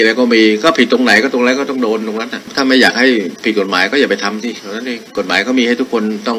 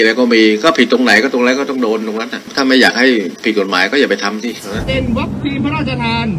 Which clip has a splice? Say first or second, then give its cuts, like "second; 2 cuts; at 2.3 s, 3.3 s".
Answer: second; 1 cut; at 4.7 s